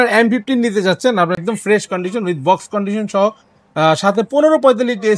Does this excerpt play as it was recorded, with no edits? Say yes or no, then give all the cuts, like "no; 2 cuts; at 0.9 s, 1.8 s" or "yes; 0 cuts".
yes; 0 cuts